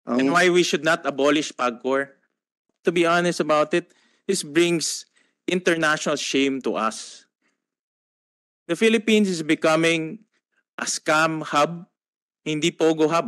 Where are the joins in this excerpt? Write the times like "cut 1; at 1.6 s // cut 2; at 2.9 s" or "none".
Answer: cut 1; at 2.7 s